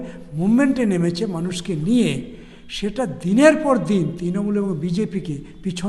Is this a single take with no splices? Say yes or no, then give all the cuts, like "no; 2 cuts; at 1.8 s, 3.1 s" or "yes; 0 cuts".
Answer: yes; 0 cuts